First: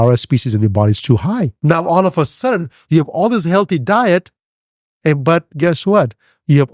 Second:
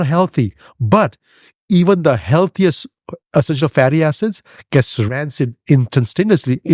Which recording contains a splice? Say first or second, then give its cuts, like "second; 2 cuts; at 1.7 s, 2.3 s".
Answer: first; 1 cut; at 1.6 s